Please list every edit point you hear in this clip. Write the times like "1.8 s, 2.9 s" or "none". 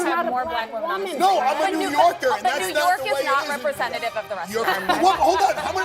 4.6 s